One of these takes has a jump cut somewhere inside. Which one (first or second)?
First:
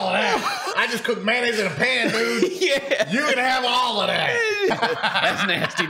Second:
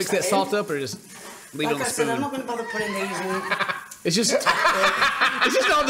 first